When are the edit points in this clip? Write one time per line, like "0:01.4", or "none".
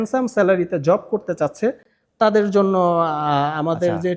none